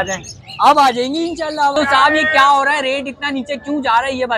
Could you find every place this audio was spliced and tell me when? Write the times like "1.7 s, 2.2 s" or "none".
1.7 s